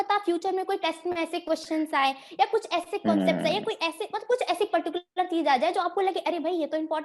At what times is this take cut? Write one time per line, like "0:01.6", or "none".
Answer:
none